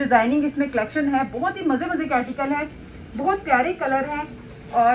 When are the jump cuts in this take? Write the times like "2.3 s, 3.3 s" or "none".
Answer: none